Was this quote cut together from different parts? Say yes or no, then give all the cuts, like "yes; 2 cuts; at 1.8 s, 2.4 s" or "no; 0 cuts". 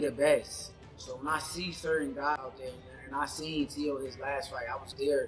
yes; 1 cut; at 2.4 s